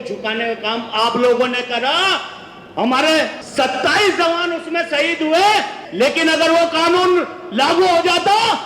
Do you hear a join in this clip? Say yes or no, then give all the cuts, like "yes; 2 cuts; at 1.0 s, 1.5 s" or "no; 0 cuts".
yes; 2 cuts; at 3.4 s, 5.8 s